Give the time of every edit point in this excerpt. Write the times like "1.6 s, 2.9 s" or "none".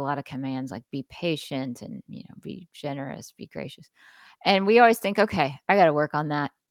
none